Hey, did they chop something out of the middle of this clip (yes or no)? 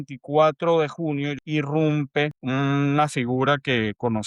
yes